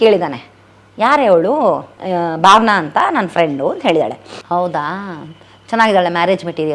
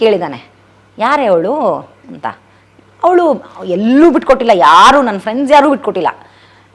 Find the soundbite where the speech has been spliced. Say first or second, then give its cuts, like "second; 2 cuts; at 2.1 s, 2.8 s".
first; 2 cuts; at 1.9 s, 4.3 s